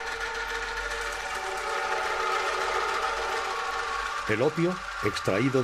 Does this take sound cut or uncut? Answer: cut